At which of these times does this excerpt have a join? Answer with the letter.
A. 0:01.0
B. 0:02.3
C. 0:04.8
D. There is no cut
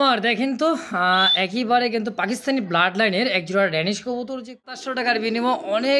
C